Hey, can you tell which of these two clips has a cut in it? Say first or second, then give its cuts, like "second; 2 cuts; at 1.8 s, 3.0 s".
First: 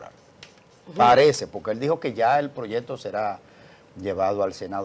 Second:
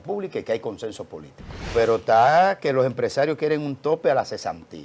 second; 1 cut; at 1.7 s